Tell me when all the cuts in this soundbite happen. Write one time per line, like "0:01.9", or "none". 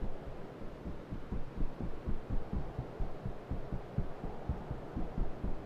none